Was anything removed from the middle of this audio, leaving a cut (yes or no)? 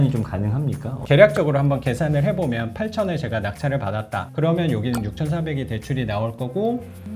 yes